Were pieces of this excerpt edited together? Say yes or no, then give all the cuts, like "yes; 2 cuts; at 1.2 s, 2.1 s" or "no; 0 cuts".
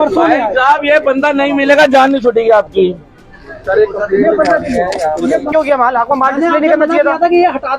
yes; 1 cut; at 5.5 s